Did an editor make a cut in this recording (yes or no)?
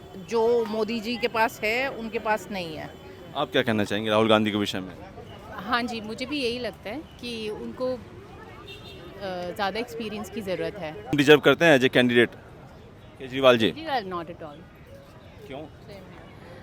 yes